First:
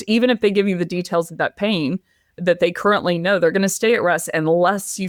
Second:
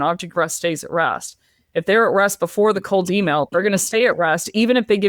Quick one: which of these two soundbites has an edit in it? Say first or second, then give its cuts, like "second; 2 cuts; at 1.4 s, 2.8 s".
second; 1 cut; at 2.8 s